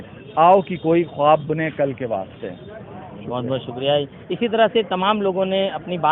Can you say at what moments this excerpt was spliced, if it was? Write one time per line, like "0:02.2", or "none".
none

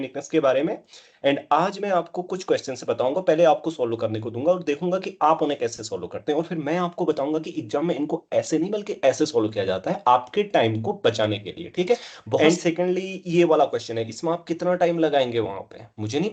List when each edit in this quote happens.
0:12.4

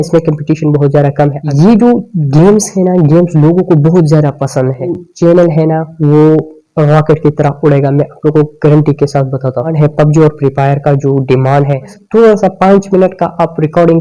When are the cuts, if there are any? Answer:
0:01.4
0:05.0
0:09.7
0:12.0

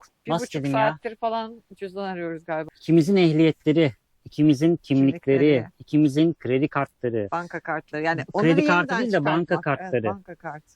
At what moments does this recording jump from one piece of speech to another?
0:02.7

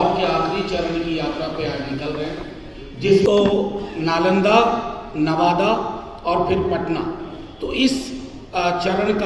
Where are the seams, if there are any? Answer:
0:03.3

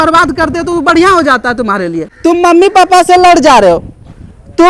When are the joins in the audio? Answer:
0:02.1

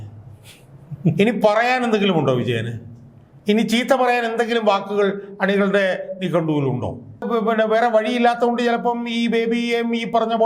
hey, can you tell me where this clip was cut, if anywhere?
0:07.2

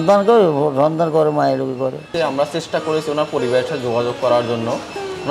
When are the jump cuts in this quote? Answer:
0:02.1

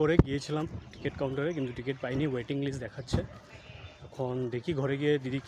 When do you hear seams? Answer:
none

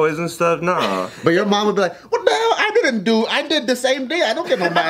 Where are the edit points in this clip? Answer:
none

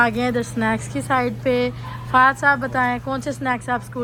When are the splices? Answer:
none

